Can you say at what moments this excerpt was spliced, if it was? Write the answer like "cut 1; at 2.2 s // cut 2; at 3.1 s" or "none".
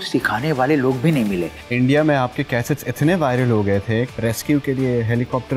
cut 1; at 1.5 s // cut 2; at 4.1 s